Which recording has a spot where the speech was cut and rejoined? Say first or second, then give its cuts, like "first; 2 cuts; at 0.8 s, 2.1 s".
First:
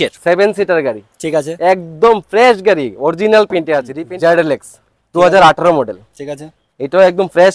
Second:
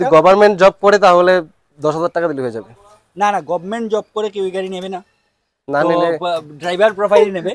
first; 1 cut; at 4.0 s